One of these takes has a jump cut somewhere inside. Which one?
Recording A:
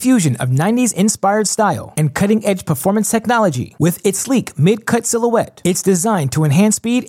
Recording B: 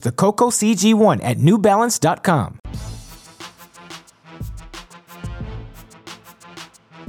B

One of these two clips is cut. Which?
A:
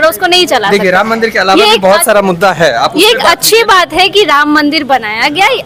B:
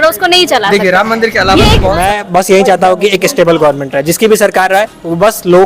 B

